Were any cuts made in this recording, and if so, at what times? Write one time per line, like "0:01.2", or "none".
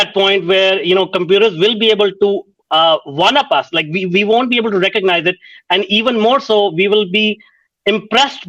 none